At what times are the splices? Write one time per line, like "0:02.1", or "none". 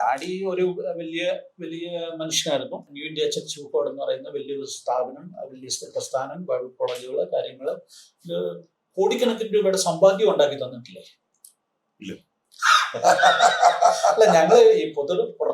0:02.9